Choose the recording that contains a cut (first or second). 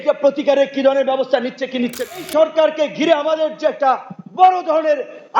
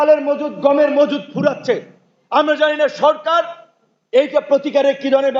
first